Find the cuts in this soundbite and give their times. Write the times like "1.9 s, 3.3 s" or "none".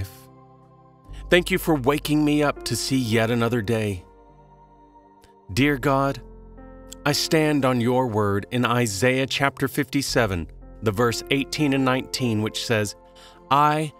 none